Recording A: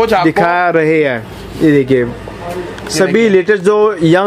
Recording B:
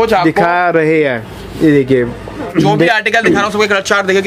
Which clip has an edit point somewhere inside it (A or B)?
B